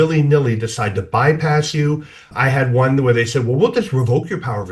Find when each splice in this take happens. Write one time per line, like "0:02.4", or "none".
0:02.3